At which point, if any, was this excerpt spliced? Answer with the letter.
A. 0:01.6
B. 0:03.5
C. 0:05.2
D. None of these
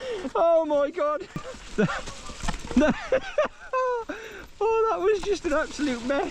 A